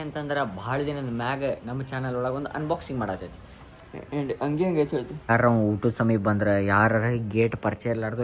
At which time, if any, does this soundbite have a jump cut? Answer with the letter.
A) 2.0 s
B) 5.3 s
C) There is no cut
B